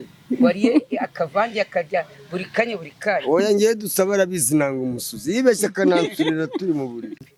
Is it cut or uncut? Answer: uncut